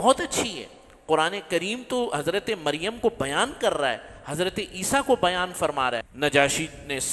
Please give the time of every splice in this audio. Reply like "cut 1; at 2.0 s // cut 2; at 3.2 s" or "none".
cut 1; at 6.1 s